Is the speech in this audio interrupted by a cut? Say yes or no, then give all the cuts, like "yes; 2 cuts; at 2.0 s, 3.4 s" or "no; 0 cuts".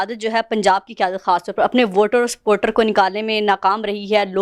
no; 0 cuts